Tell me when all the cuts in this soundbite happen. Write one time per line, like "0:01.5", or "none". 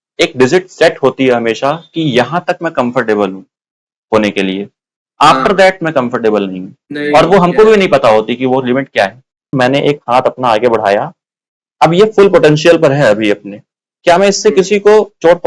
0:09.5